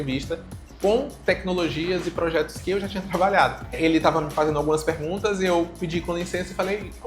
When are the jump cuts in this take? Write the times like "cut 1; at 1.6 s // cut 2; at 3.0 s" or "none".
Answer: cut 1; at 3.8 s

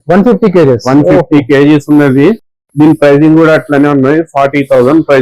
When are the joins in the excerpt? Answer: none

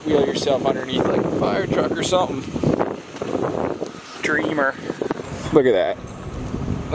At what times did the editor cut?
cut 1; at 5.2 s

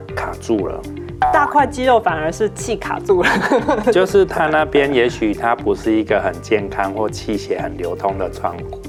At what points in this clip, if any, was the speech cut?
none

